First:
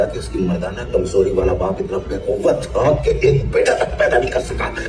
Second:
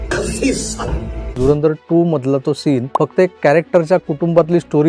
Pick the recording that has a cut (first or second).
second